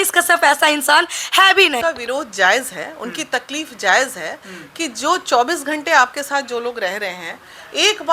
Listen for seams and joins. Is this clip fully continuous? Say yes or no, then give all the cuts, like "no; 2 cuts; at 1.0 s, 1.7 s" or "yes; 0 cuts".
no; 1 cut; at 1.8 s